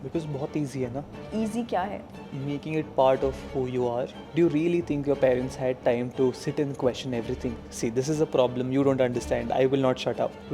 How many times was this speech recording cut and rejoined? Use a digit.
2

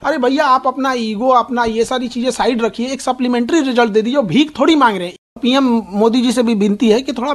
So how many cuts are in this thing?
1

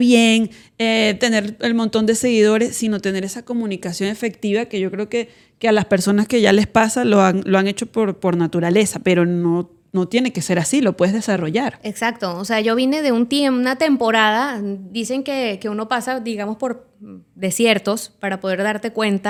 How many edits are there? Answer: 0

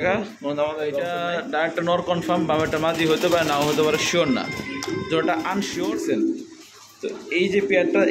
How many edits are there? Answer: 2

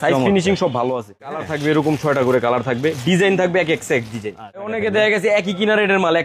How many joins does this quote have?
2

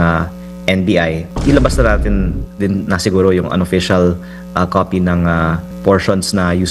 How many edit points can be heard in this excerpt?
2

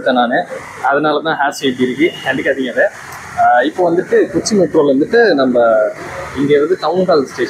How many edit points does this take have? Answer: 0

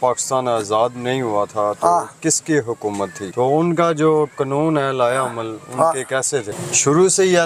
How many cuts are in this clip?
2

